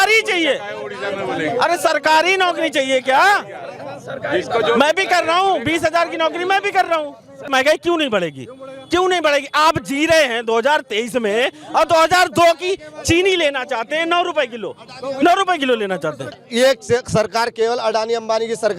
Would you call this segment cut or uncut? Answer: cut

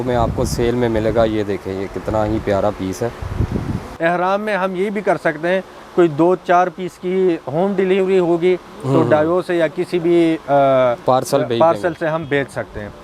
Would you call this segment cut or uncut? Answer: cut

